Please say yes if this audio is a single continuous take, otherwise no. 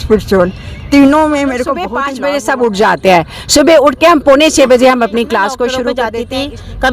no